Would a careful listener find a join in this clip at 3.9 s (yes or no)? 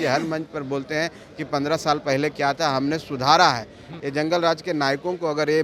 yes